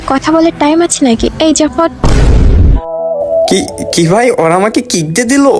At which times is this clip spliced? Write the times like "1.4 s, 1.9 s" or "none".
none